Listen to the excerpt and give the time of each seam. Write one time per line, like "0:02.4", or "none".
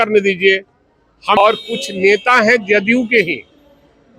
0:01.4